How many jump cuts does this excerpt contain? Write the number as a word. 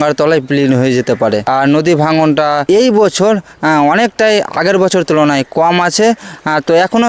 two